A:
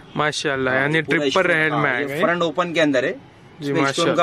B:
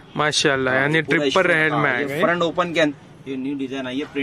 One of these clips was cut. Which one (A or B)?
B